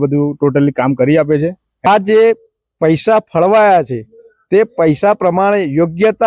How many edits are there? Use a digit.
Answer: 1